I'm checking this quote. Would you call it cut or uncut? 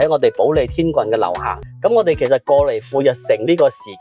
cut